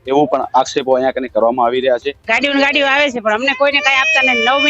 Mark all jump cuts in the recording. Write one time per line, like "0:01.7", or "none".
0:02.2